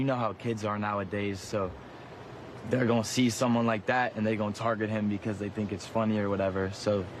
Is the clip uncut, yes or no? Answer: yes